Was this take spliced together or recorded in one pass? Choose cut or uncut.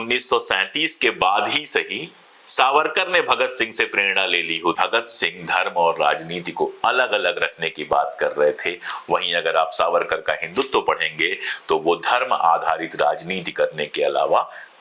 cut